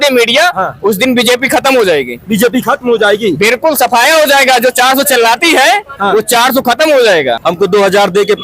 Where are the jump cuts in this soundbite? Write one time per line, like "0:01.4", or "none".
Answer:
0:07.4